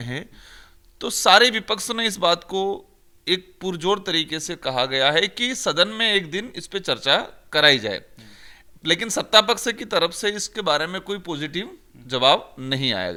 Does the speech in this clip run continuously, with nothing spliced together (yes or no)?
yes